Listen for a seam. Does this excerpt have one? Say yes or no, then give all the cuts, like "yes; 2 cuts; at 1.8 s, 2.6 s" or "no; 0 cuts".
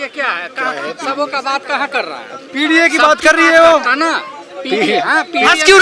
no; 0 cuts